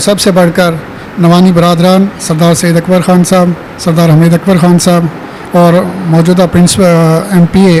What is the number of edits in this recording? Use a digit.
0